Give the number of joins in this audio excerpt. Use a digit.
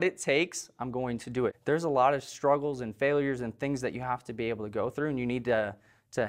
1